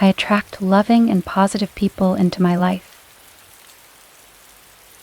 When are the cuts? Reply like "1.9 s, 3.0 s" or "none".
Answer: 2.9 s